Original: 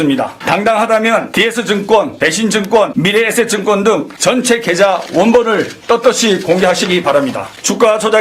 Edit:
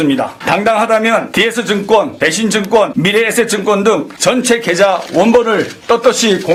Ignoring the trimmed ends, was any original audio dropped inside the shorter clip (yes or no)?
no